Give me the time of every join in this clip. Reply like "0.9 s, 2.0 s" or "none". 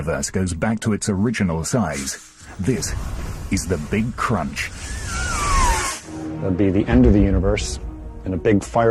none